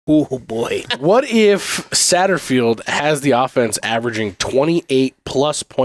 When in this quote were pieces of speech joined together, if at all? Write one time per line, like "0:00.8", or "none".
0:00.9